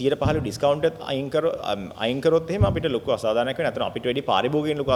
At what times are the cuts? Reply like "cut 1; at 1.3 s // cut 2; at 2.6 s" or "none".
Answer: none